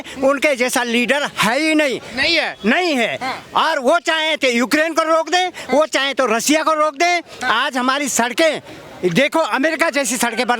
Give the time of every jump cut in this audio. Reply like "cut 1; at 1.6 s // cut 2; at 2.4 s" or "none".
cut 1; at 7.3 s